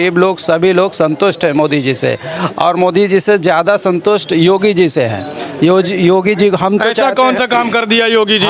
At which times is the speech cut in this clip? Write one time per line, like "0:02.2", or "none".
none